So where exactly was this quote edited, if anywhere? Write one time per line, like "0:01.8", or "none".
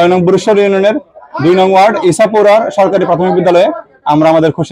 none